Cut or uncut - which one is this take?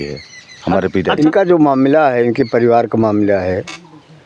cut